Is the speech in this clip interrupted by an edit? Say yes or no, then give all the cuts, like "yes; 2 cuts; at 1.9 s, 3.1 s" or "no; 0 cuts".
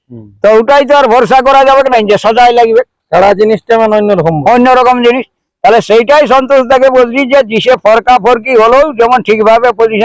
no; 0 cuts